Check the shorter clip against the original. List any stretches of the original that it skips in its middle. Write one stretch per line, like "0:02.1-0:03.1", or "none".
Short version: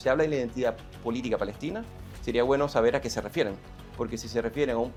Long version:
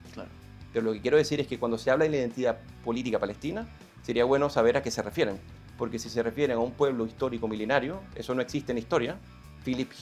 none

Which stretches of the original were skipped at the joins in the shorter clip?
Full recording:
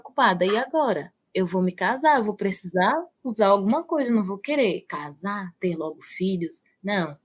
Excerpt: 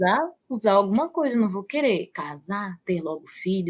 none

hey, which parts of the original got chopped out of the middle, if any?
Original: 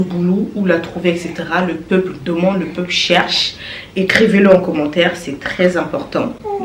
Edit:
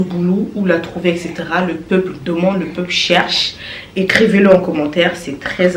none

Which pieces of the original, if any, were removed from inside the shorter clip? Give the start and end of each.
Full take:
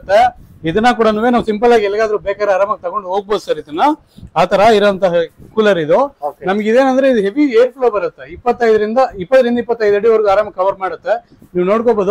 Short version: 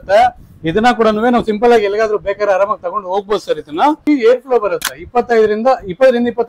0:04.0-0:07.3

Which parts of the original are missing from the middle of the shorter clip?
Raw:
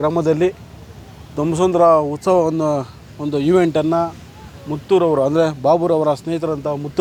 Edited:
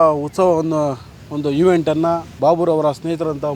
0:04.2-0:05.6

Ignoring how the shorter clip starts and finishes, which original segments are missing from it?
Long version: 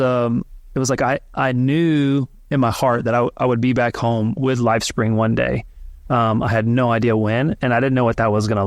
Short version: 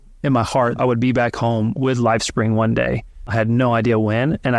0:03.0-0:03.3
0:05.9-0:06.5

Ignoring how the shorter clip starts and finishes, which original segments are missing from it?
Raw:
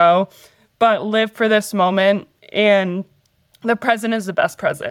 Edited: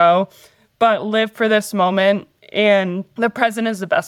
0:03.0-0:03.5

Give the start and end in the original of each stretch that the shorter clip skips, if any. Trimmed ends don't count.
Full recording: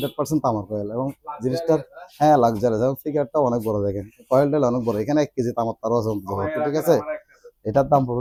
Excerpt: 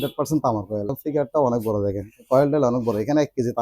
0:00.9-0:02.9

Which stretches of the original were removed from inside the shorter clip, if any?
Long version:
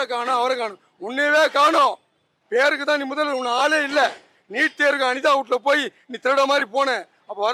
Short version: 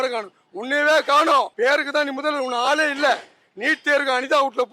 0:02.0-0:02.4

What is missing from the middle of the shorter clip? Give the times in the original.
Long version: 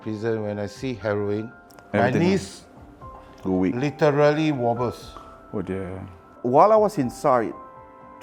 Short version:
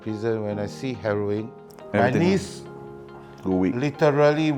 none

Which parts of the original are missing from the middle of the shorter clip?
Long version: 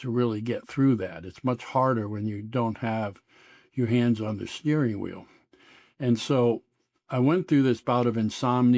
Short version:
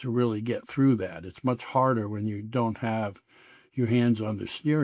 none

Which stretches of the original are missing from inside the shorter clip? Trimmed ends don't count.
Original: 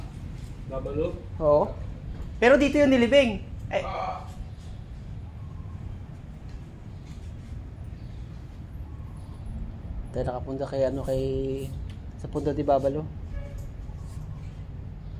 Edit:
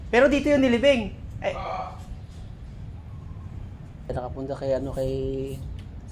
0:06.4-0:10.2

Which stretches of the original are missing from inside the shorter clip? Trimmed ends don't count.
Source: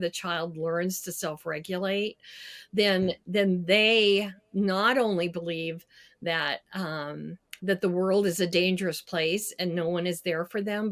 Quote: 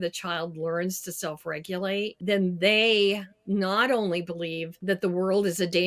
0:02.2-0:03.2
0:05.8-0:07.5

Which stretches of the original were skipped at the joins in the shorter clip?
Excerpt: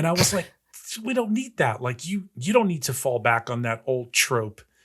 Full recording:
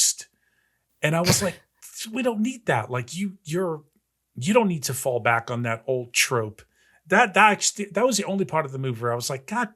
0:03.4-0:04.3

